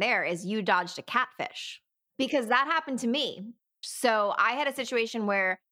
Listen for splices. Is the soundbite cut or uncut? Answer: cut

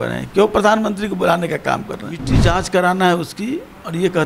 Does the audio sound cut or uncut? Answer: cut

